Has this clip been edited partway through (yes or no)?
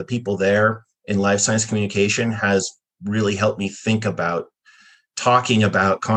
no